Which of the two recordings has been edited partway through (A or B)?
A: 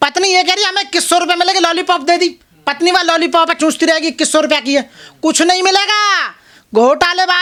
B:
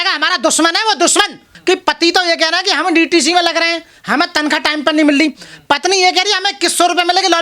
B